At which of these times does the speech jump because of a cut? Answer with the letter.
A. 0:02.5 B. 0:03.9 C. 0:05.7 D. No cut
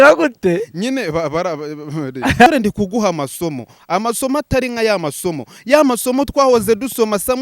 A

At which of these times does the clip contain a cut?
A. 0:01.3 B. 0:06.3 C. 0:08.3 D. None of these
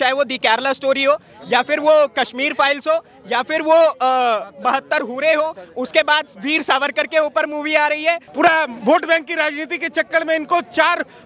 C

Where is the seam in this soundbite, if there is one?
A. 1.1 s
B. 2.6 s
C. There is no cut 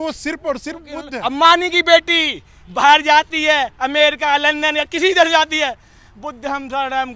A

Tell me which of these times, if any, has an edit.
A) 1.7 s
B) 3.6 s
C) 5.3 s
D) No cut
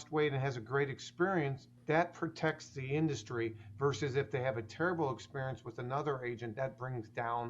A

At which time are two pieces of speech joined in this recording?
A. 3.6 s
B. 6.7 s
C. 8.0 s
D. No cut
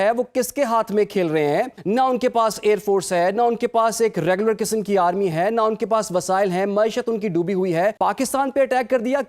C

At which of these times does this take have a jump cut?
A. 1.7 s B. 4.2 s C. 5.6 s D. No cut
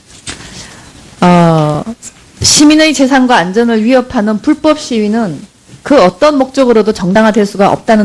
B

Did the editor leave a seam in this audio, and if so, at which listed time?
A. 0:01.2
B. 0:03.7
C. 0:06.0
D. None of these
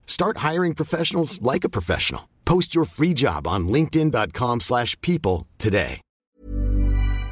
C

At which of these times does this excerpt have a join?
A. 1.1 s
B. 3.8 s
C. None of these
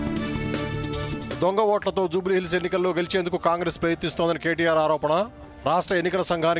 A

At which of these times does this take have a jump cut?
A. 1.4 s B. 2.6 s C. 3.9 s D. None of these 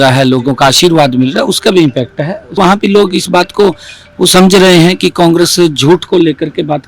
B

